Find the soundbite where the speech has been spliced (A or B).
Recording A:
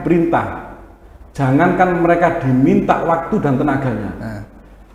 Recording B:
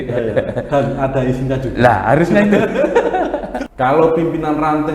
B